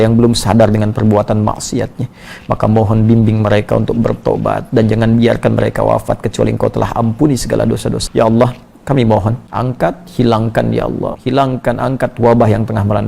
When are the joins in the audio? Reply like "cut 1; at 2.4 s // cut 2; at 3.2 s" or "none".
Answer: cut 1; at 8.0 s // cut 2; at 9.5 s // cut 3; at 11.2 s